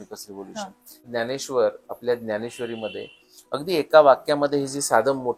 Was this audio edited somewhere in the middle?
yes; 1 cut; at 1.0 s

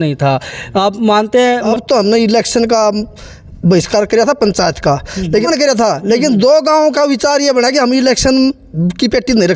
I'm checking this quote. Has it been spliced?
yes; 2 cuts; at 1.7 s, 5.5 s

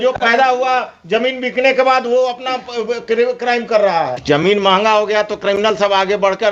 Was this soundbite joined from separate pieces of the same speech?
yes; 1 cut; at 4.2 s

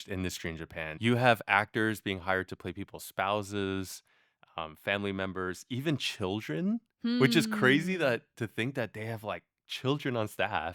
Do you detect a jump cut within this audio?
yes; 1 cut; at 1.0 s

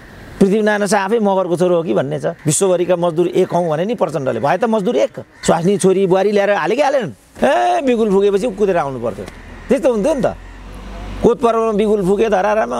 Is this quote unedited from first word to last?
no; 3 cuts; at 2.3 s, 5.3 s, 7.2 s

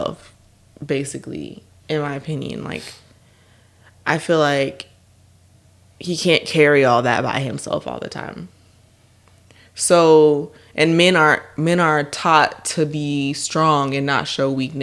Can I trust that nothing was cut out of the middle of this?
yes; 0 cuts

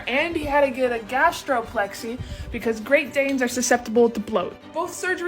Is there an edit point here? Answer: no; 0 cuts

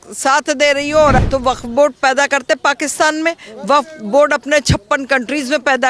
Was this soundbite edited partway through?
yes; 1 cut; at 1.2 s

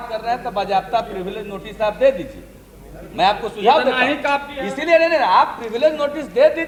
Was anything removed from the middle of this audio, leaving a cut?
no; 0 cuts

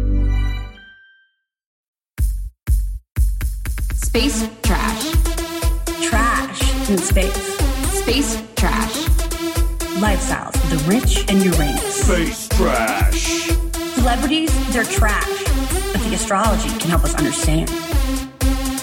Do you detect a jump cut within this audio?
yes; 1 cut; at 1.7 s

